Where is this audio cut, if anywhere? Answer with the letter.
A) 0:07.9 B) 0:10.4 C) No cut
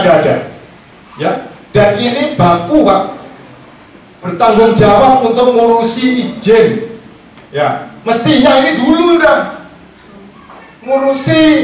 C